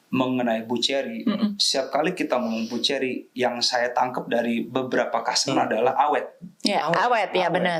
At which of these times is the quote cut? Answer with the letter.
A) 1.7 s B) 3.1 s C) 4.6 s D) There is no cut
D